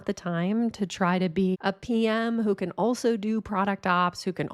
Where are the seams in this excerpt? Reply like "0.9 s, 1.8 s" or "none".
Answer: 1.6 s